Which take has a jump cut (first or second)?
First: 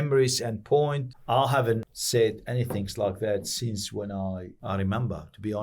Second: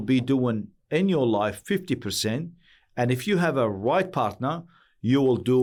first